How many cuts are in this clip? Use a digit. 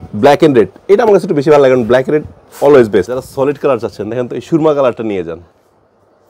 1